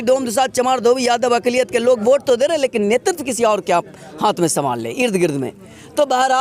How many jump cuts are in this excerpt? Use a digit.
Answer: 0